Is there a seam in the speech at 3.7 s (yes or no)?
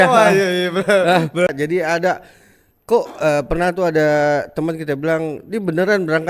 no